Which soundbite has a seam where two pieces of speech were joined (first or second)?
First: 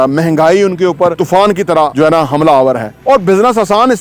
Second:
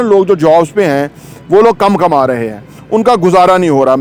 first